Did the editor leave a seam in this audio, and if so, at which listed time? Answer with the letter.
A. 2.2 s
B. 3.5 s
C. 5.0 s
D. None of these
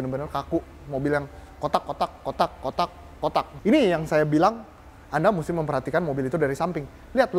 B